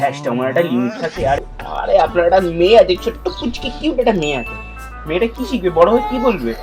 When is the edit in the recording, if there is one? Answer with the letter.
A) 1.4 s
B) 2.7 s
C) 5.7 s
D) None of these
A